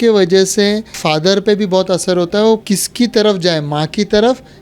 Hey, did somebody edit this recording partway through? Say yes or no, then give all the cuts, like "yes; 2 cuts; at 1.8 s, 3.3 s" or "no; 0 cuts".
yes; 2 cuts; at 1.0 s, 2.6 s